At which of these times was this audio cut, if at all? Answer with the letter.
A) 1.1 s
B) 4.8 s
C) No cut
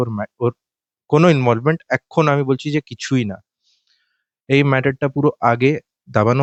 C